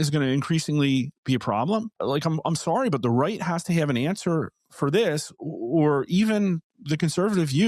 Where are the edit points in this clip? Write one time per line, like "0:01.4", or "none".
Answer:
0:01.9